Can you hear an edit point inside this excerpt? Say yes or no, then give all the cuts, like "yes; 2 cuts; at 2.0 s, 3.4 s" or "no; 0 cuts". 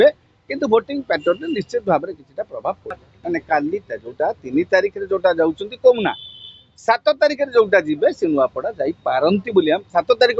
yes; 1 cut; at 2.9 s